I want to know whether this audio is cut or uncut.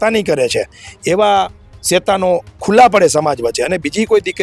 uncut